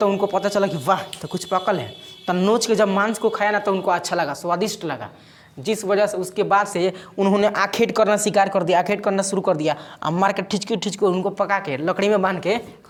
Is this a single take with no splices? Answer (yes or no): yes